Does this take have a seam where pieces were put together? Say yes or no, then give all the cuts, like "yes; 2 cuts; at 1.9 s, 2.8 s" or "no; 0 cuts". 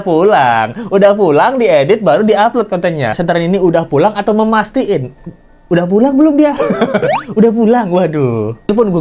yes; 1 cut; at 3.2 s